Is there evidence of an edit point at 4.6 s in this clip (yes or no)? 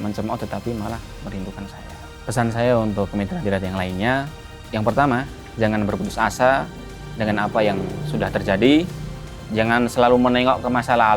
no